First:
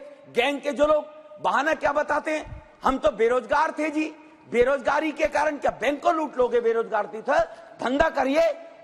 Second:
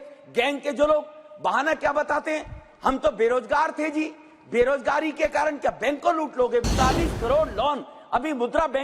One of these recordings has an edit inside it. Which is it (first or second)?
second